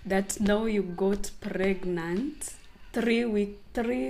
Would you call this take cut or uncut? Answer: uncut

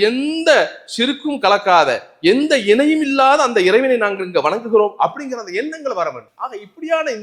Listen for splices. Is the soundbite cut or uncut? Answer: uncut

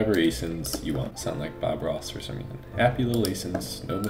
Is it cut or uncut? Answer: cut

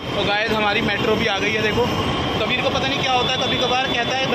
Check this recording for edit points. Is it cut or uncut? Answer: uncut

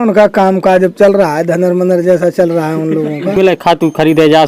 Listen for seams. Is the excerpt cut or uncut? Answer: cut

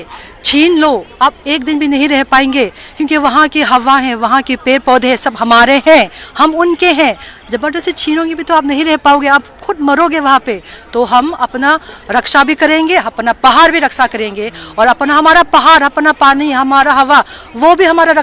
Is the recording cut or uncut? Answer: uncut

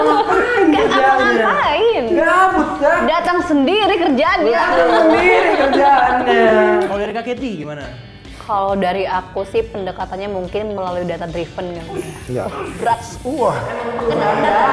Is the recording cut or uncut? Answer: cut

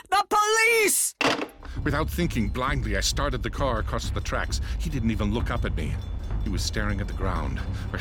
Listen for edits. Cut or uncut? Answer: cut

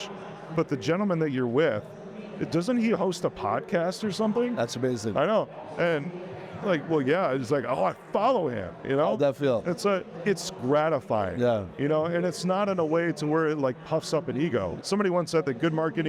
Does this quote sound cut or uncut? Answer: cut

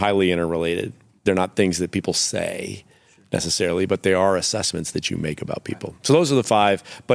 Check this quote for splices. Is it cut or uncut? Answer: cut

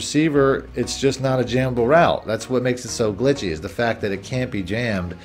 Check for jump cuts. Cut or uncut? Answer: uncut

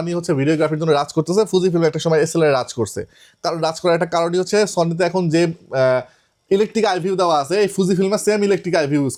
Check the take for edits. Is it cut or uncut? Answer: uncut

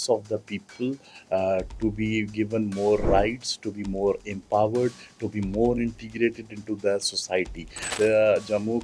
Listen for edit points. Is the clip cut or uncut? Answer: cut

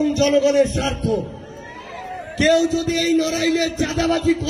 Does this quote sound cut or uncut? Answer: uncut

